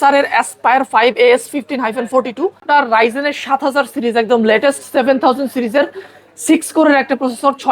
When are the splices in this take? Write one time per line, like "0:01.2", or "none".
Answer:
0:02.6

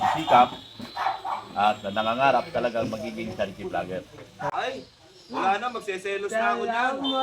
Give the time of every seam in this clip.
0:04.5

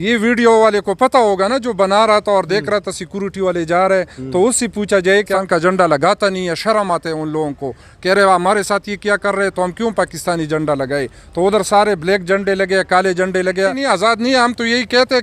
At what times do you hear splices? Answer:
0:05.3
0:13.8

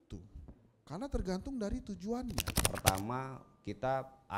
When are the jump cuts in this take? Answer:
0:02.7

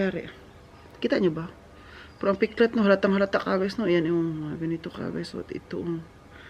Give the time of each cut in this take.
none

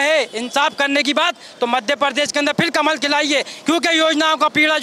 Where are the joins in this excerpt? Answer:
none

